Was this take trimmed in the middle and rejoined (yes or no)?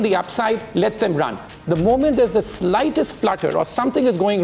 no